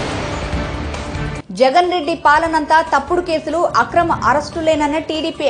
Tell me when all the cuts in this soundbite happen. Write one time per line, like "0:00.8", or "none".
0:01.3